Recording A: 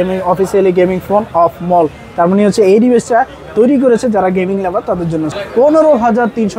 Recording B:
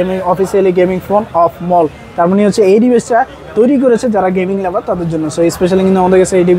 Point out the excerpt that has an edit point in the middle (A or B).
A